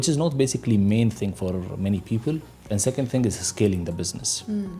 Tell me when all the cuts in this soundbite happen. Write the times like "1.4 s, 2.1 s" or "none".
none